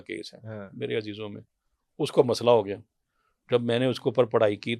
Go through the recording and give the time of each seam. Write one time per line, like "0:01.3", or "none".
none